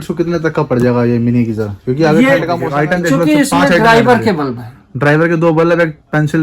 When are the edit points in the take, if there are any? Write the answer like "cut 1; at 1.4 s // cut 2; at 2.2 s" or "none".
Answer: cut 1; at 2.7 s